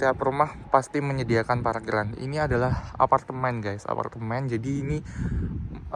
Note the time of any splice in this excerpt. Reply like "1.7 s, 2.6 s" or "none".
none

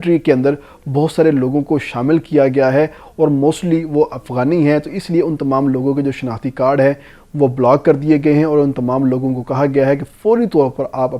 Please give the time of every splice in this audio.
none

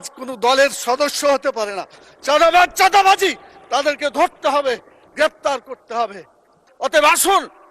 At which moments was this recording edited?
6.6 s

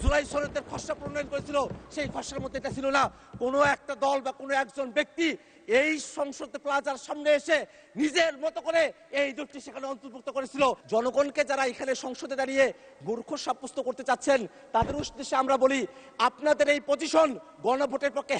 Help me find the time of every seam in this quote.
10.8 s

